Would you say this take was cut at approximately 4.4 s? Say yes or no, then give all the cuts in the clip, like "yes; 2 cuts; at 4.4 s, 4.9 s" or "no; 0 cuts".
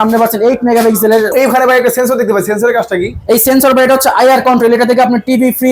no; 1 cut; at 1.3 s